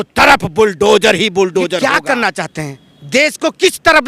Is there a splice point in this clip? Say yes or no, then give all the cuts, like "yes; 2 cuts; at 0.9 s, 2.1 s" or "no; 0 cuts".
yes; 1 cut; at 1.8 s